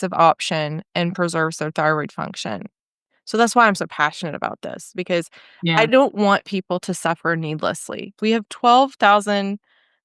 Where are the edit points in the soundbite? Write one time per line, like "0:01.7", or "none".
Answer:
0:08.3